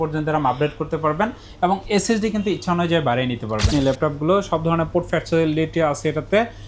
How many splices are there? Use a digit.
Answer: 1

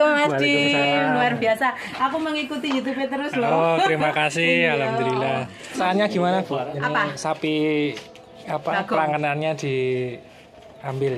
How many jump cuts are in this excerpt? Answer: 1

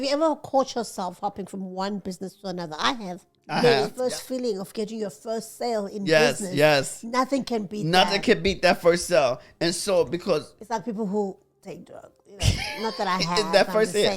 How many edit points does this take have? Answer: 1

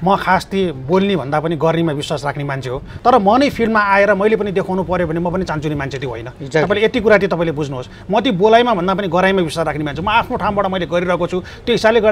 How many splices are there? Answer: 1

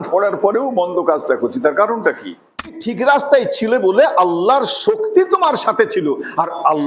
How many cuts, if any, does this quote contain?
1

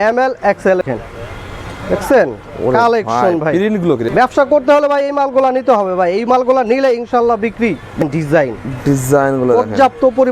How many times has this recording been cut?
3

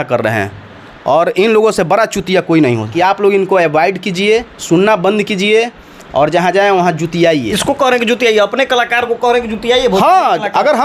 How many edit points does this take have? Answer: 2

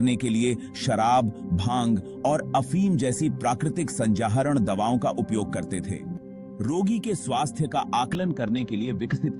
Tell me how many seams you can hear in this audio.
1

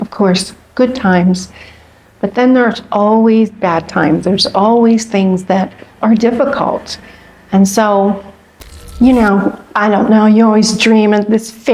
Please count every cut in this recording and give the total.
1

